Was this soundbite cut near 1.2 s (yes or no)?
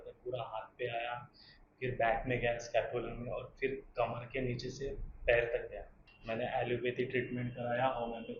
no